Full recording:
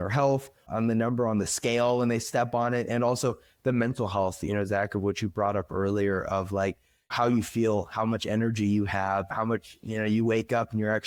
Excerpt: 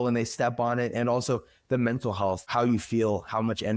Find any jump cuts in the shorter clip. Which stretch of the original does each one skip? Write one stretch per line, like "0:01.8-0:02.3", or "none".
0:04.4-0:07.1